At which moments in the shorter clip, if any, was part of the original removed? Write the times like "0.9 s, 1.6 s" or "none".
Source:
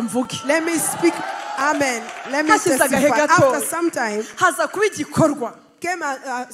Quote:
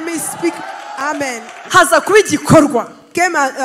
1.6 s